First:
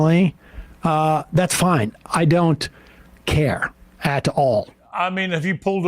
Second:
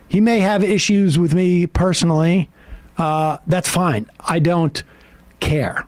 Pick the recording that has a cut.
first; 1 cut; at 4.7 s

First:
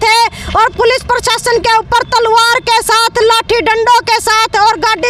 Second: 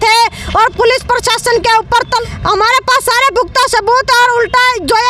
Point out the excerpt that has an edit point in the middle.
second; 1 cut; at 2.2 s

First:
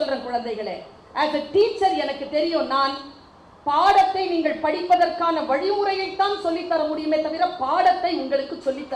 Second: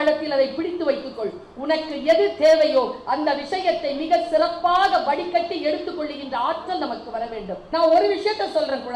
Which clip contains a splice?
second; 1 cut; at 7.6 s

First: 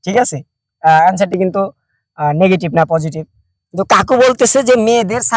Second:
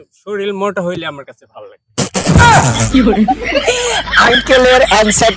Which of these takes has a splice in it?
second; 2 cuts; at 2.3 s, 3.4 s

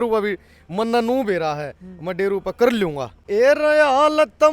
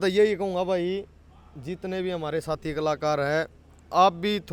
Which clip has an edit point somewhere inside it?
first; 1 cut; at 3.1 s

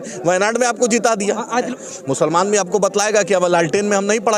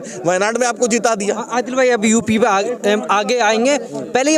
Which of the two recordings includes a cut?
first; 1 cut; at 1.7 s

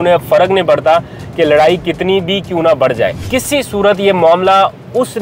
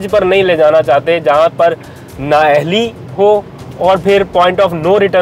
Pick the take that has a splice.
first; 1 cut; at 3.2 s

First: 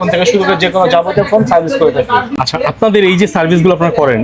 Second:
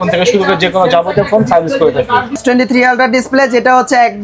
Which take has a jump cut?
second; 1 cut; at 2.4 s

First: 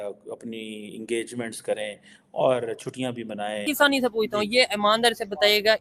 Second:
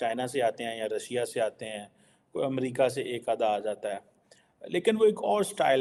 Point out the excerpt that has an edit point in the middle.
first; 1 cut; at 3.6 s

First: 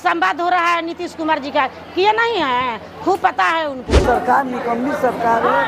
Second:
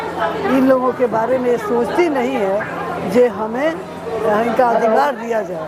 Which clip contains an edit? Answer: first; 1 cut; at 4.0 s

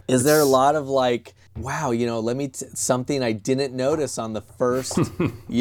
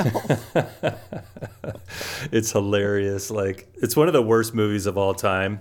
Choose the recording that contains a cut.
second; 1 cut; at 3.9 s

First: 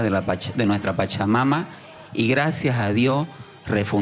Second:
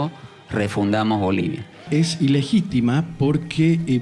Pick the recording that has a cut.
second; 1 cut; at 1.9 s

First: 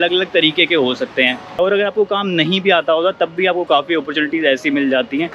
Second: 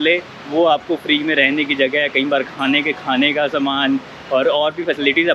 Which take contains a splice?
first; 1 cut; at 1.6 s

